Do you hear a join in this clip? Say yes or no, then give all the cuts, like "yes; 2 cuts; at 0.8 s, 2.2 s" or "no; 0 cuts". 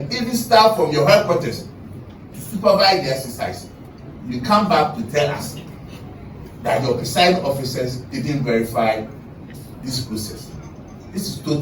no; 0 cuts